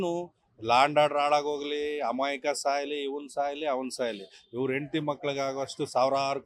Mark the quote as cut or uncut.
uncut